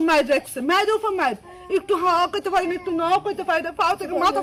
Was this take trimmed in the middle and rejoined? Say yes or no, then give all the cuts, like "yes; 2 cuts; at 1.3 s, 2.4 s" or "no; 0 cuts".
no; 0 cuts